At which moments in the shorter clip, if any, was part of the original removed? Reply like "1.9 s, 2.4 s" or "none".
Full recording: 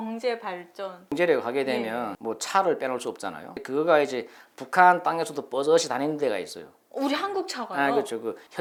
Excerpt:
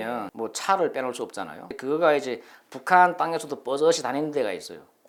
none

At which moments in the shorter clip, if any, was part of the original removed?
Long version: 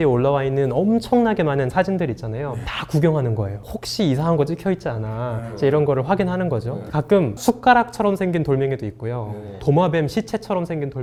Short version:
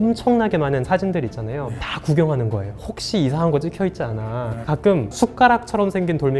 4.6 s

